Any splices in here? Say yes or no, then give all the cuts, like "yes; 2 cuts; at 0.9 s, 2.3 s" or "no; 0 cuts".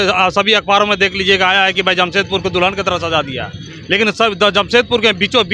no; 0 cuts